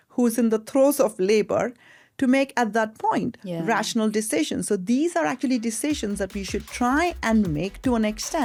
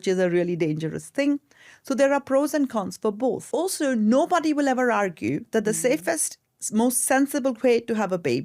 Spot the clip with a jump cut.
second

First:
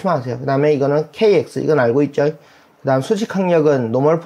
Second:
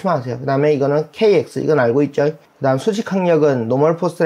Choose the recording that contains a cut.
second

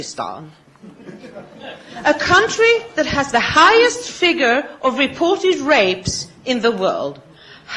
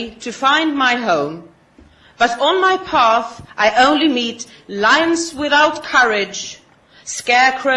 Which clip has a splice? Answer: second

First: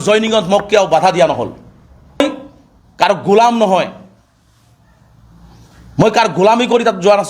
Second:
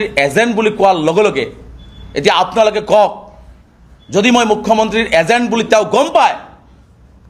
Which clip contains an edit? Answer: first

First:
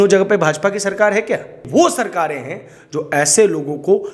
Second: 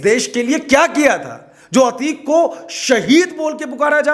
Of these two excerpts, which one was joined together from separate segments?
first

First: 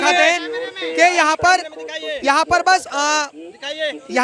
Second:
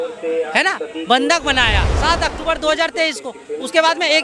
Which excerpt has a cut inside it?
second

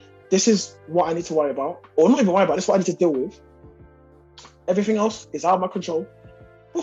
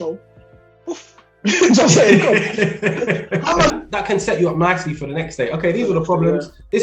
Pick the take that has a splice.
second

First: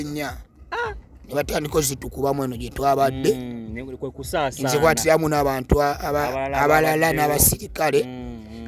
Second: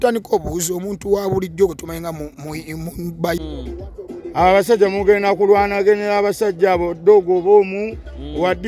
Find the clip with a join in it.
second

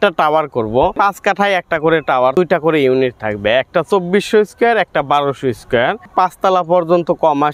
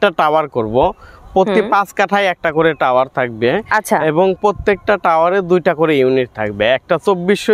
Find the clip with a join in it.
first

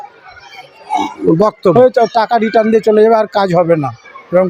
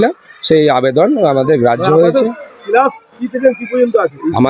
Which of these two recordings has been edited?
first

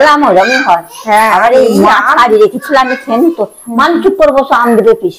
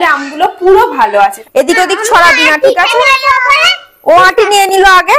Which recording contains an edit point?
second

